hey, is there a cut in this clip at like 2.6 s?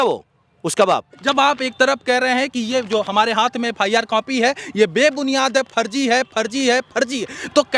no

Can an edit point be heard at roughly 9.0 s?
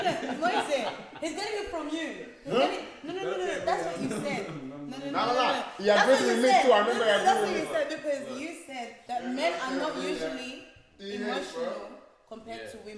yes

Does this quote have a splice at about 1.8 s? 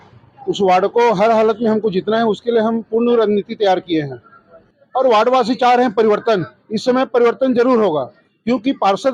no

